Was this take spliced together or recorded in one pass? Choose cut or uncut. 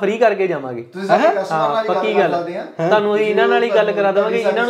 uncut